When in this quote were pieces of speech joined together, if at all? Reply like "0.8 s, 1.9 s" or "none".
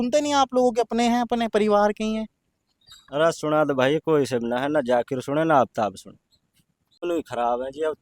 7.0 s